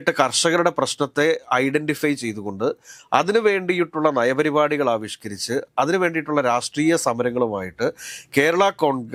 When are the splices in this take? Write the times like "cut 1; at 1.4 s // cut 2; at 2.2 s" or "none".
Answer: none